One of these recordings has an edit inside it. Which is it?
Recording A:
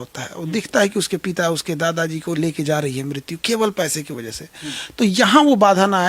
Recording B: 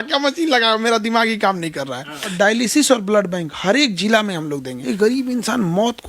B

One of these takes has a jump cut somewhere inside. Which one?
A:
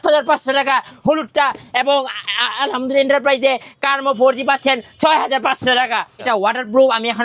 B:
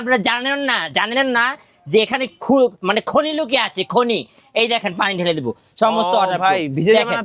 A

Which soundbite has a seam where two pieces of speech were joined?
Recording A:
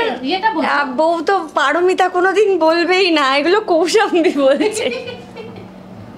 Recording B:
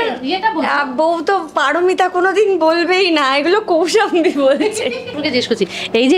B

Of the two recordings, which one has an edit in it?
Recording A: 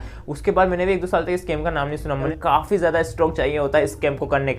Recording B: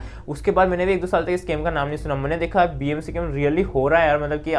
A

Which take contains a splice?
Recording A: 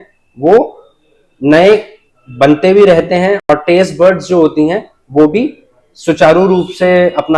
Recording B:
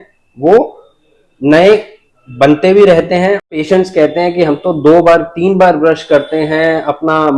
B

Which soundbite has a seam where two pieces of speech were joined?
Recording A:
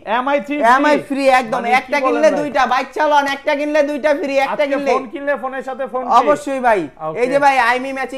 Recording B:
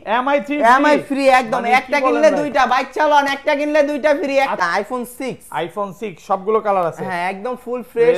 B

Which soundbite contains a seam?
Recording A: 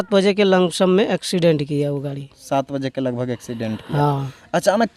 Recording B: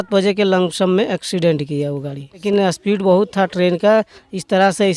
B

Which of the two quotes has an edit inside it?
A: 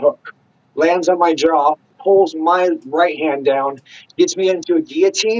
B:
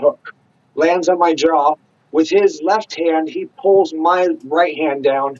A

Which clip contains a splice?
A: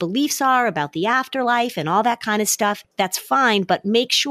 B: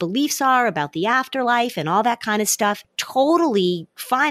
A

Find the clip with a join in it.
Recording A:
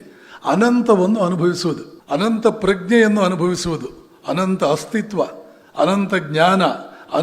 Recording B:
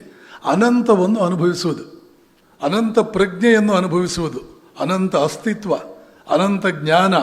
A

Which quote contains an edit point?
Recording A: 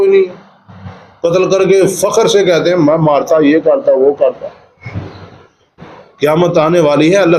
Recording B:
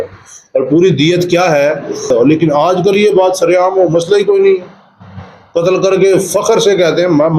B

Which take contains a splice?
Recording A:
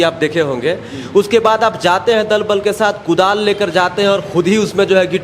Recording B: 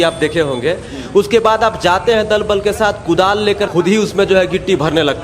B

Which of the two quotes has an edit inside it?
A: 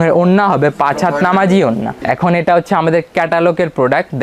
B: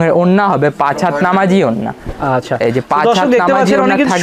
A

